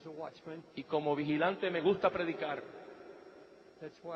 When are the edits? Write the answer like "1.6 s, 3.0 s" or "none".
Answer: 2.7 s